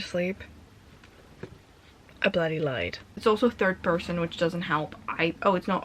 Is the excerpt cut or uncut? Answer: cut